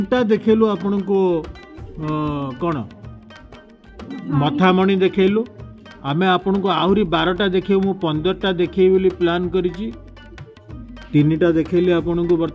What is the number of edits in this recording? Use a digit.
0